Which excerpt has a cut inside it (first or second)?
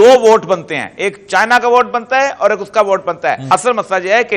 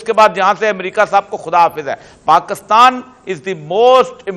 first